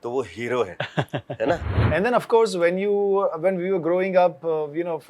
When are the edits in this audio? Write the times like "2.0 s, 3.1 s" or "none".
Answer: 1.7 s